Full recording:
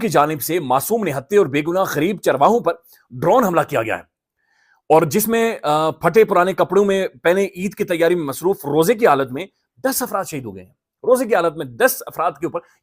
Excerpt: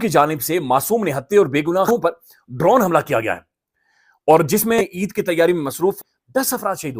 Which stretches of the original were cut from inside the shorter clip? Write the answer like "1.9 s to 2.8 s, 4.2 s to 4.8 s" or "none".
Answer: 1.9 s to 2.5 s, 5.4 s to 7.4 s, 8.6 s to 9.5 s